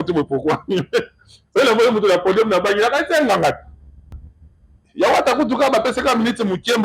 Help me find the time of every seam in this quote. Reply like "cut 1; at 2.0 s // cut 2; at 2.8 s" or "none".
cut 1; at 4.2 s